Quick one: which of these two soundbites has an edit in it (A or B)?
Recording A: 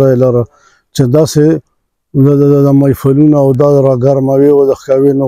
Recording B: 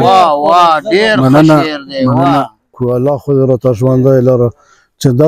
B